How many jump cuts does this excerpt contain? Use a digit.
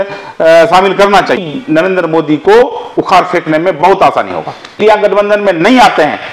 2